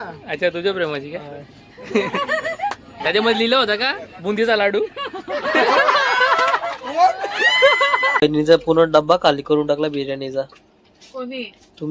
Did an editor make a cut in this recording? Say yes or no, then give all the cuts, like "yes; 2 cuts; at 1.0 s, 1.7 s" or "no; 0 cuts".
yes; 1 cut; at 8.2 s